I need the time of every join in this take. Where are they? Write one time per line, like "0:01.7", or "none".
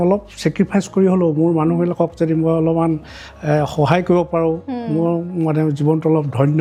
none